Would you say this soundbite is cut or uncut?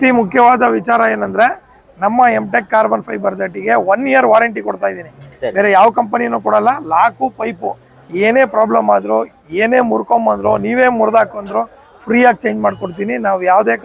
uncut